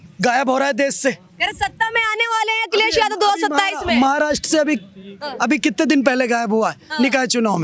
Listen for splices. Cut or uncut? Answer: uncut